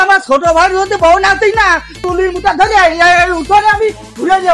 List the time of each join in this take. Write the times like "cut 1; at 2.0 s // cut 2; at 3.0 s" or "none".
cut 1; at 2.0 s